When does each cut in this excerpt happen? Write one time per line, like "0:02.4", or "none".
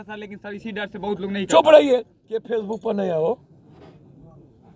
0:02.4